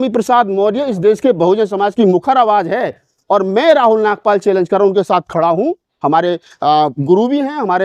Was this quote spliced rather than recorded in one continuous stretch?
no; 0 cuts

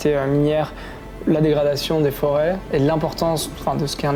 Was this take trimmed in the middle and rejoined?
no; 0 cuts

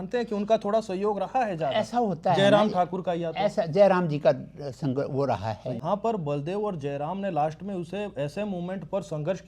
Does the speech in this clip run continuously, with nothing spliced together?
no; 1 cut; at 5.8 s

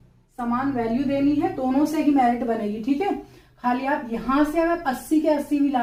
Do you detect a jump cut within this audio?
no; 0 cuts

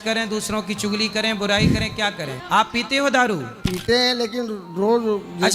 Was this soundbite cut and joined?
yes; 2 cuts; at 2.3 s, 3.5 s

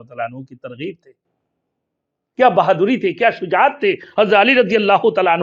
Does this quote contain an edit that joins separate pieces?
no; 0 cuts

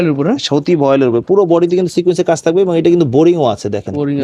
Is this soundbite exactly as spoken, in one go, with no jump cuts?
yes; 0 cuts

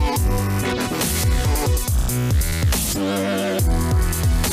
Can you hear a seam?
yes; 1 cut; at 1.0 s

